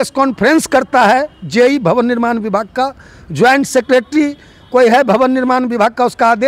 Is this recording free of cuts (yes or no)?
yes